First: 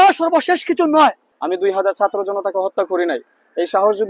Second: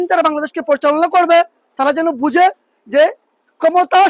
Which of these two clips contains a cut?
first; 1 cut; at 1.3 s

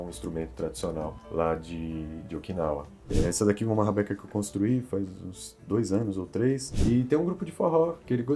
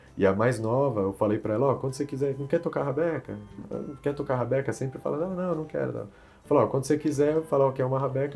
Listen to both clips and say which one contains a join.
first; 2 cuts; at 3.1 s, 6.7 s

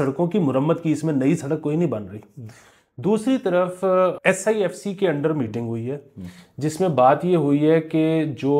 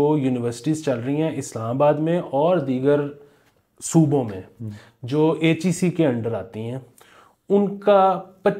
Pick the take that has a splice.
first; 1 cut; at 4.2 s

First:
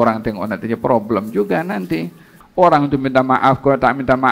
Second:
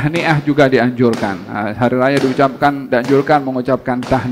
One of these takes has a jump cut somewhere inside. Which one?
first; 1 cut; at 2.3 s

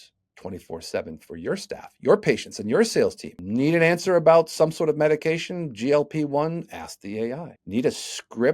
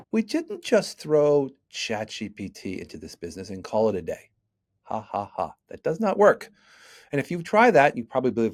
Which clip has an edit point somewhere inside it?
first; 2 cuts; at 3.3 s, 7.5 s

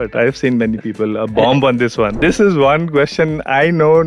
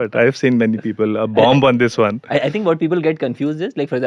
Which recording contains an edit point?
first; 1 cut; at 2.2 s

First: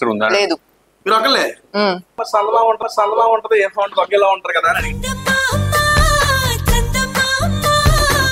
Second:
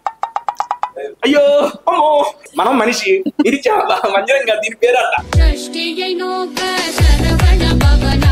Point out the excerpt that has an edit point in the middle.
second; 2 cuts; at 2.4 s, 5.3 s

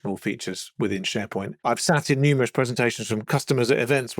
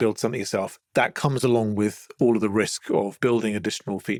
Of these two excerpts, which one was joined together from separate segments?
first; 2 cuts; at 1.6 s, 3.3 s

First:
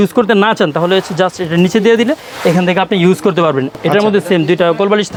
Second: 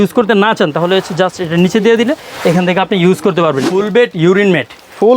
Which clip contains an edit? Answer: second; 1 cut; at 3.7 s

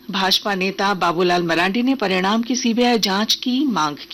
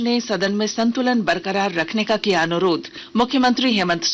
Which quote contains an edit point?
second; 1 cut; at 2.9 s

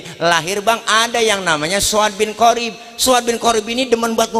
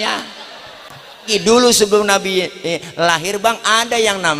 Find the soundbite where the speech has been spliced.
second; 1 cut; at 1.3 s

